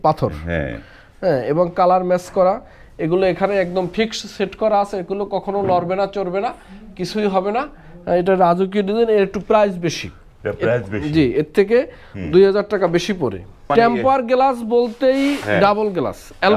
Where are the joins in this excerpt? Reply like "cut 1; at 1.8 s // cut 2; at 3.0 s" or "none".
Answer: cut 1; at 13.6 s